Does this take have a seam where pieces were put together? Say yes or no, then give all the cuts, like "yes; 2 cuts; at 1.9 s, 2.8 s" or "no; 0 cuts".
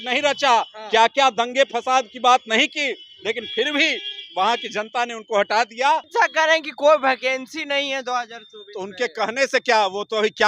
yes; 1 cut; at 6.1 s